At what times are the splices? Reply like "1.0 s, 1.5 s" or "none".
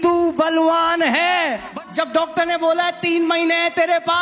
1.7 s